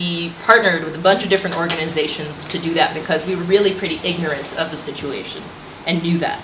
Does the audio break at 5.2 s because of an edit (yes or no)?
no